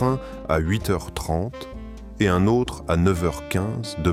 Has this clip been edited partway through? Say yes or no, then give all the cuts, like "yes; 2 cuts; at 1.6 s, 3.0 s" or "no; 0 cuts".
no; 0 cuts